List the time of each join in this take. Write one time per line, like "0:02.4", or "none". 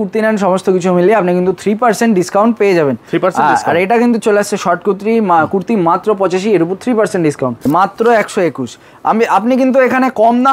0:07.7